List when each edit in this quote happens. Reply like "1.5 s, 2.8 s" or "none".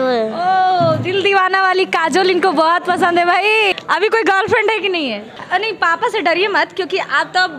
3.7 s, 5.3 s